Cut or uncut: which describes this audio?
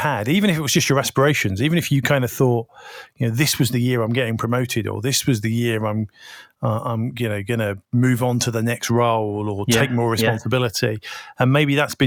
uncut